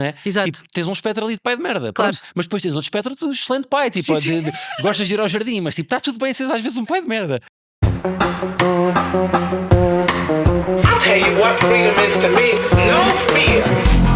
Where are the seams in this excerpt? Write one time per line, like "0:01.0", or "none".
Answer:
0:07.3